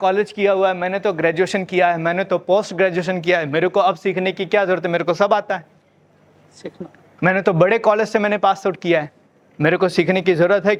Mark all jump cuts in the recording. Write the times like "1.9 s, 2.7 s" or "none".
none